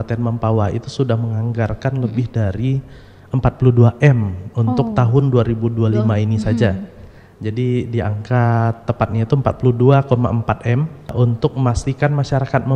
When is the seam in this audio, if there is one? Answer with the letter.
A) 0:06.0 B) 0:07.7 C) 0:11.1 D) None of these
C